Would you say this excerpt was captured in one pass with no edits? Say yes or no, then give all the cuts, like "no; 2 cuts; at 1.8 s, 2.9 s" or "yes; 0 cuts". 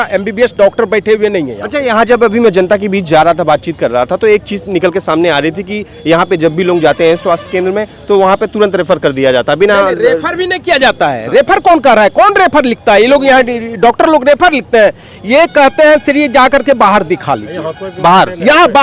yes; 0 cuts